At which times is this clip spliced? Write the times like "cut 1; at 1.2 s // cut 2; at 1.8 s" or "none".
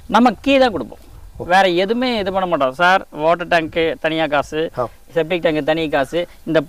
none